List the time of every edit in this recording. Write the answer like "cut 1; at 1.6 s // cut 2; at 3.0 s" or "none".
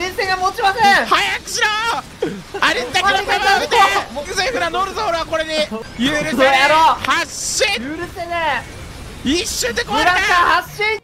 cut 1; at 4.3 s // cut 2; at 5.7 s